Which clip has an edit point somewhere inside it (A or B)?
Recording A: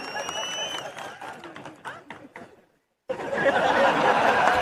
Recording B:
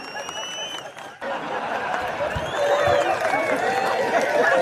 B